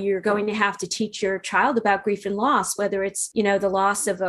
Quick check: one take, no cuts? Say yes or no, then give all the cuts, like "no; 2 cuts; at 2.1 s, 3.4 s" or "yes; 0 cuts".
no; 1 cut; at 3.2 s